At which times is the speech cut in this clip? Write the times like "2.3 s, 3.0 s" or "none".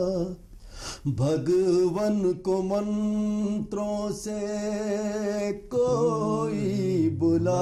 none

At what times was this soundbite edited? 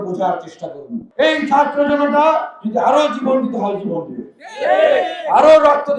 1.0 s

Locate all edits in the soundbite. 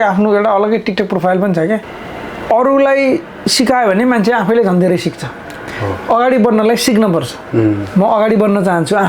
1.9 s

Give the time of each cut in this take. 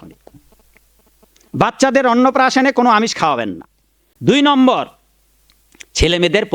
4.1 s

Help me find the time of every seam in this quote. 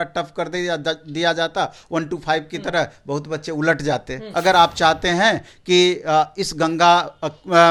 4.3 s

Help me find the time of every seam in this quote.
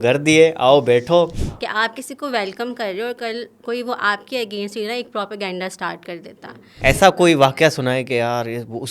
1.4 s, 6.8 s

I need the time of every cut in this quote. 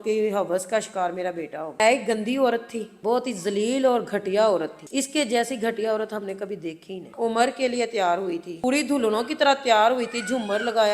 1.8 s, 2.9 s, 7.0 s, 8.5 s

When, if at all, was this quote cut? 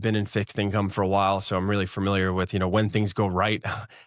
none

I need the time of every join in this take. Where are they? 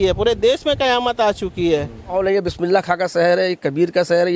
2.1 s

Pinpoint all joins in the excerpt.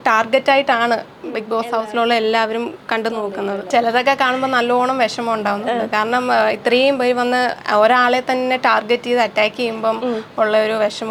none

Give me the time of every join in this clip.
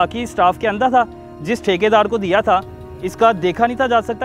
none

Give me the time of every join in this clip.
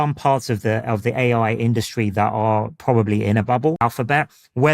3.8 s

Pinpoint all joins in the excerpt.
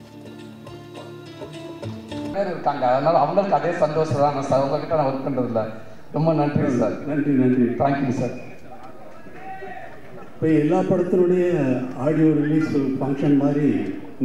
2.4 s

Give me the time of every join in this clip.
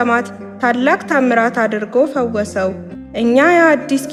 none

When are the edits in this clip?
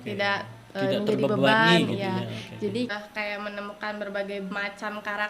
2.9 s

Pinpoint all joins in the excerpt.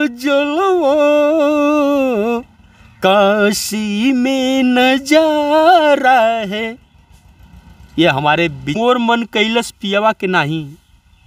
8.8 s

